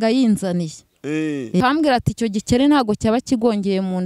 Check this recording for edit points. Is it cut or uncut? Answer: cut